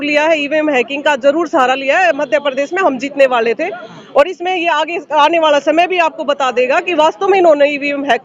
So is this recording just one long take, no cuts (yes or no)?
yes